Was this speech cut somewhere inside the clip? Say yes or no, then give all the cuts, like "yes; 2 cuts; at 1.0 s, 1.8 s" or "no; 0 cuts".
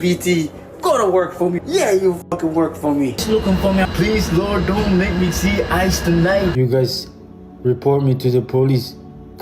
yes; 3 cuts; at 1.6 s, 3.2 s, 6.5 s